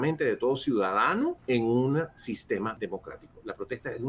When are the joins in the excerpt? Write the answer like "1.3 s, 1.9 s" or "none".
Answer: 1.4 s, 2.8 s